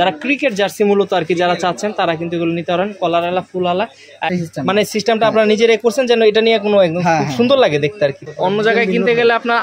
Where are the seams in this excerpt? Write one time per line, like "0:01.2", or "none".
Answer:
0:04.3
0:08.2